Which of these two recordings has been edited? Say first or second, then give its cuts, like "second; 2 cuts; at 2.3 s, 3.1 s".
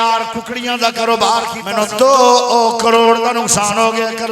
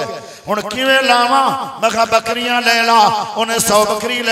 first; 1 cut; at 1.6 s